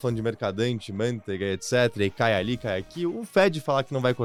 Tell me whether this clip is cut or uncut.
uncut